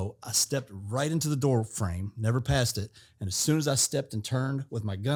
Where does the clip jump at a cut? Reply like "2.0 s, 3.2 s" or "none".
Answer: none